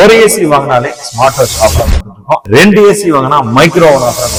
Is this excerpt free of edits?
yes; 0 cuts

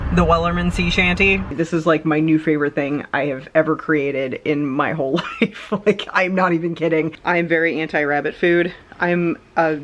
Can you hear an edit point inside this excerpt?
yes; 2 cuts; at 1.5 s, 7.2 s

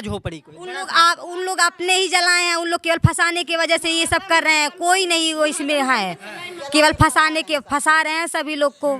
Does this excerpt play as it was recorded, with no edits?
yes; 0 cuts

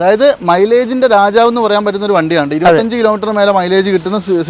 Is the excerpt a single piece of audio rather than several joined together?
yes; 0 cuts

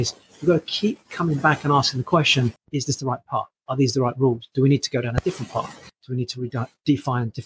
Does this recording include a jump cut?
yes; 2 cuts; at 2.5 s, 5.9 s

